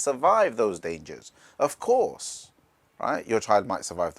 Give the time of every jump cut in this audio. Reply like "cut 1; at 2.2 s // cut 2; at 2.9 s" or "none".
none